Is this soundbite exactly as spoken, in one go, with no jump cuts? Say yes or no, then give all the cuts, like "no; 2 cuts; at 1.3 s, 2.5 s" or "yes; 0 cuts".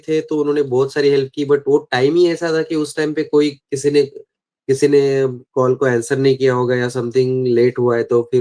yes; 0 cuts